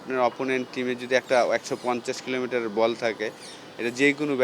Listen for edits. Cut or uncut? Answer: uncut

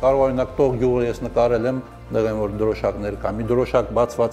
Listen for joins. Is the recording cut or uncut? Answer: cut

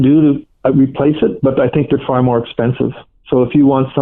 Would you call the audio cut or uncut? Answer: uncut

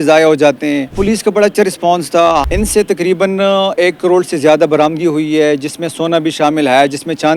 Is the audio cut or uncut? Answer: cut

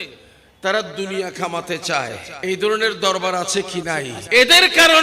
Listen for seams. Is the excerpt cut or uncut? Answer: cut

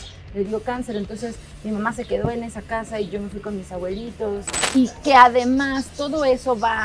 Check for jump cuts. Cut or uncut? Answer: cut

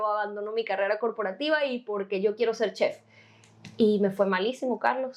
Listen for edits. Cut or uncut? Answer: uncut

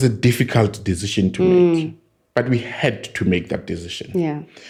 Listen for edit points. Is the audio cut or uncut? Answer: uncut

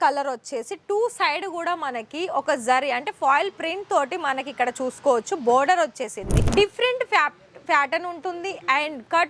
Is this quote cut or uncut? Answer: cut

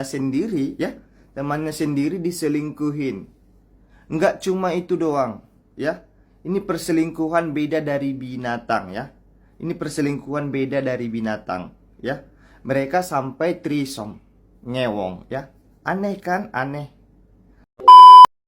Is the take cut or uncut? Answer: cut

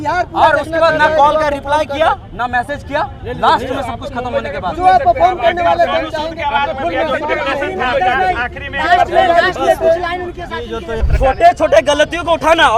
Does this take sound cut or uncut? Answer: cut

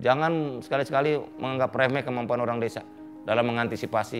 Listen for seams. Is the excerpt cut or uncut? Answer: uncut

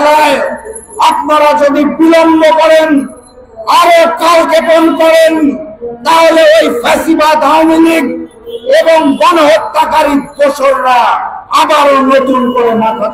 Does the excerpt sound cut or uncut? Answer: uncut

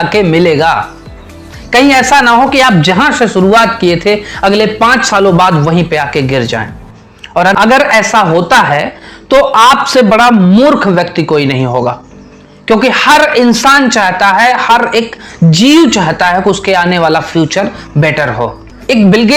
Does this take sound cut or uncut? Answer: uncut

